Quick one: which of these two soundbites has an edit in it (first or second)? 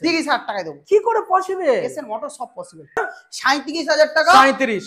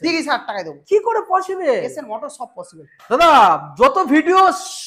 first